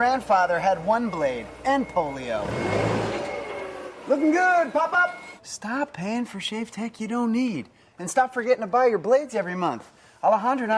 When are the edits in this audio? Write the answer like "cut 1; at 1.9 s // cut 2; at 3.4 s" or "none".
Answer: none